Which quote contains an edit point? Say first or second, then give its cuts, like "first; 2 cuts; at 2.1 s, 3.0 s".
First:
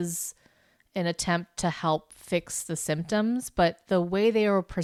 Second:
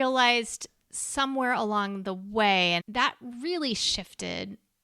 second; 1 cut; at 2.8 s